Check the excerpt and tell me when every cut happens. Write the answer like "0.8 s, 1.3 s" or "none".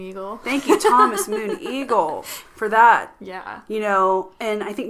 none